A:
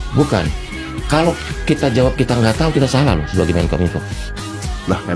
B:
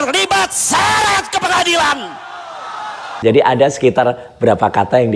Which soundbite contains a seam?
B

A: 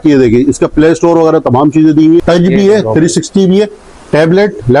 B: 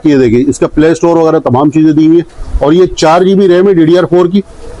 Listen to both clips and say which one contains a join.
A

